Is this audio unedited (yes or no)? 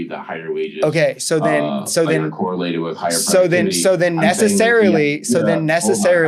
yes